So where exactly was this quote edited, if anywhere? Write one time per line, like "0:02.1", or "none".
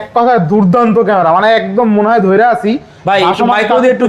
none